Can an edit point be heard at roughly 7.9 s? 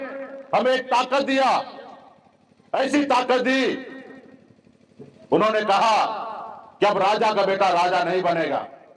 no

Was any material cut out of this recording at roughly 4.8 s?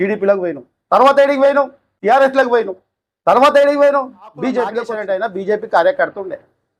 yes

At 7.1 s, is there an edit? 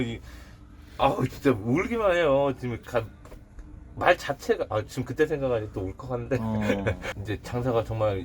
yes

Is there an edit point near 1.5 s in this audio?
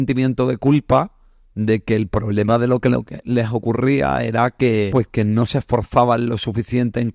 no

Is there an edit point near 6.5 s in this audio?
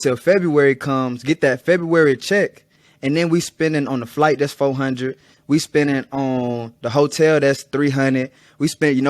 no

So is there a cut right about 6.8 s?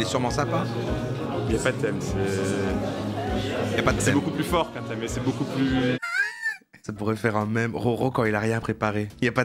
no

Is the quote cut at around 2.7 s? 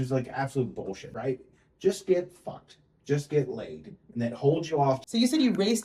no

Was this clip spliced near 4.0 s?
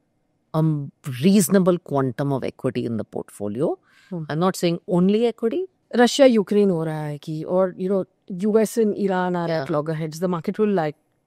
no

